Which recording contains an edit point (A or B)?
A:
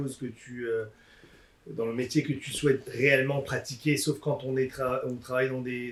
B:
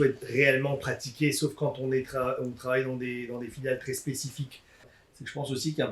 B